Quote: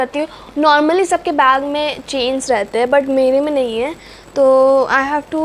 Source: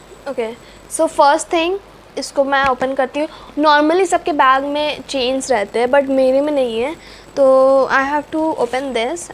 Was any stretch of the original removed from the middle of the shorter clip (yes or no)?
no